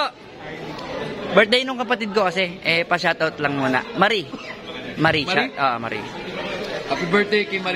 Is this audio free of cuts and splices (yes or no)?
yes